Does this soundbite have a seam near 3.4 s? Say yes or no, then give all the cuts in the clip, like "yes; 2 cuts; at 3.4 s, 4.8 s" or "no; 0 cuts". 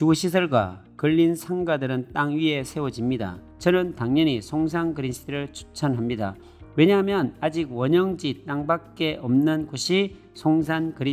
yes; 1 cut; at 3.4 s